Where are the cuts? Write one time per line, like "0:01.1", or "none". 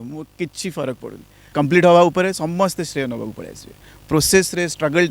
0:01.5

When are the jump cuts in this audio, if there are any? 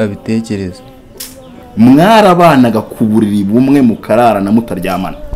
0:01.6

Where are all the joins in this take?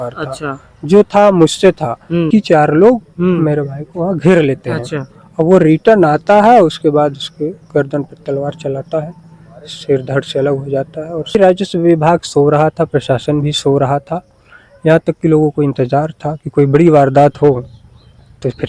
0:02.3
0:11.3

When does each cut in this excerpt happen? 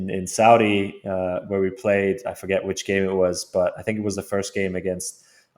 none

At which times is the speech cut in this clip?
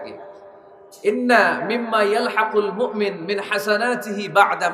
none

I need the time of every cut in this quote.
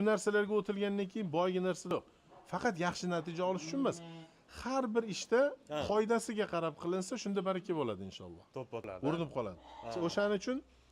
0:01.9
0:08.9

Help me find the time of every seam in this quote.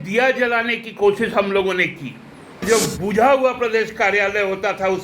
0:02.6

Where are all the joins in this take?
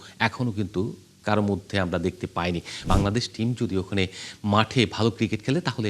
0:02.8

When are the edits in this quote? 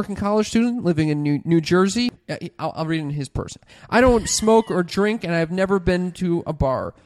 0:02.1
0:03.6

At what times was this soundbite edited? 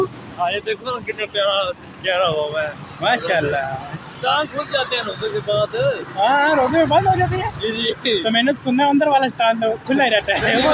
none

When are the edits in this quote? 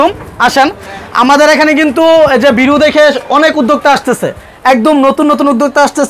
none

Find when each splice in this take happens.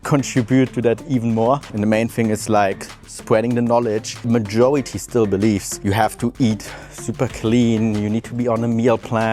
0:01.7
0:04.3
0:05.7

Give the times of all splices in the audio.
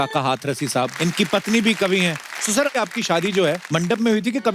0:00.9
0:02.7
0:03.6

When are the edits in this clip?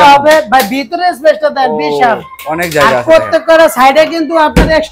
none

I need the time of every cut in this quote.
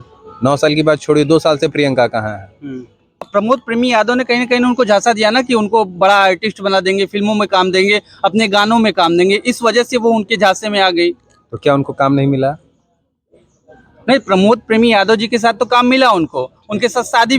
0:03.3

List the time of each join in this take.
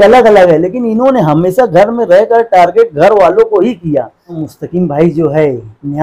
0:04.4

